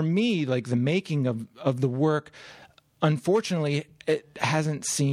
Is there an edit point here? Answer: no; 0 cuts

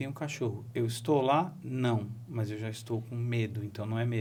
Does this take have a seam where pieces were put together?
no; 0 cuts

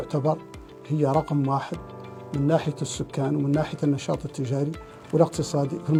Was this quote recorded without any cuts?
yes; 0 cuts

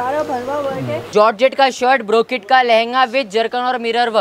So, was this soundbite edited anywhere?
yes; 1 cut; at 1.0 s

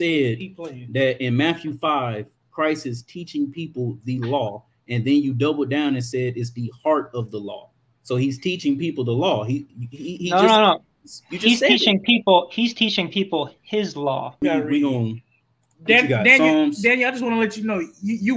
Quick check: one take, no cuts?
no; 1 cut; at 14.4 s

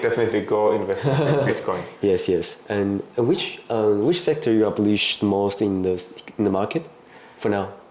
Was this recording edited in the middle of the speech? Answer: no; 0 cuts

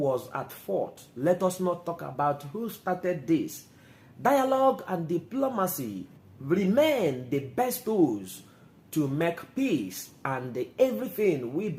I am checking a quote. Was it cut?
no; 0 cuts

